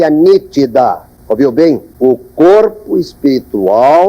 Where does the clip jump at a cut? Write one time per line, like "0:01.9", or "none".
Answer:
0:01.1
0:01.9

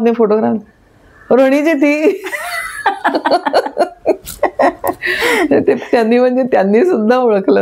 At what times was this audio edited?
none

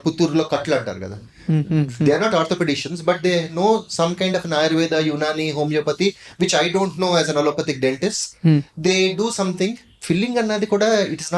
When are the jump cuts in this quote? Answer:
0:09.9

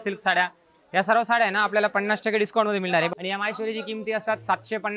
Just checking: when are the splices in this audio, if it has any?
0:03.1

